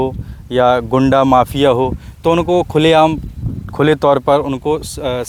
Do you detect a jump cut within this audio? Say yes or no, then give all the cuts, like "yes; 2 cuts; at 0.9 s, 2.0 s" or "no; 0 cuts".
no; 0 cuts